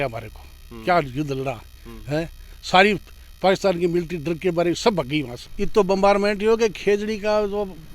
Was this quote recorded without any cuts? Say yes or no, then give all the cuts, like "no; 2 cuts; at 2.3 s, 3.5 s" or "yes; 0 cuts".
no; 1 cut; at 5.4 s